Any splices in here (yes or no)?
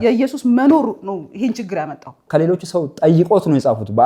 yes